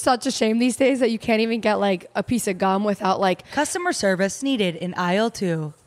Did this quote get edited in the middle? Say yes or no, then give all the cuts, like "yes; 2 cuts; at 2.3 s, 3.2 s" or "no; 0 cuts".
yes; 1 cut; at 3.4 s